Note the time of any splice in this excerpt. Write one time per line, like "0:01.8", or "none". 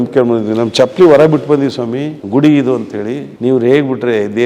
0:02.2
0:03.3